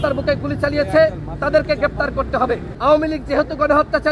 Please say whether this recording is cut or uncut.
cut